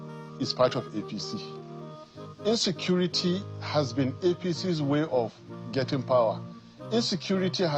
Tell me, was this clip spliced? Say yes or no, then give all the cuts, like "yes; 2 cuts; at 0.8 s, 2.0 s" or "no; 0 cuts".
no; 0 cuts